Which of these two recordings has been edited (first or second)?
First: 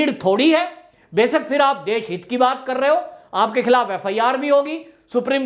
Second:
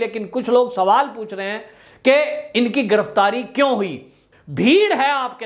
second